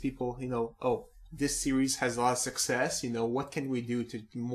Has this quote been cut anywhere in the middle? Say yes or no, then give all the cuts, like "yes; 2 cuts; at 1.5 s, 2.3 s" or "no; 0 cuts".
yes; 1 cut; at 1.2 s